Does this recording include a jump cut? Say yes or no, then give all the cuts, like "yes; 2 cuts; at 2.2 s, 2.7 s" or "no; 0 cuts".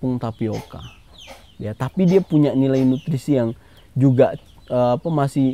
no; 0 cuts